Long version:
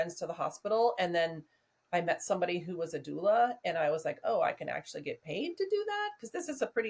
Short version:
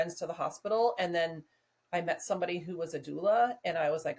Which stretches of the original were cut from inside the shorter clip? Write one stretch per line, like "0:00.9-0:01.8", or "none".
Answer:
none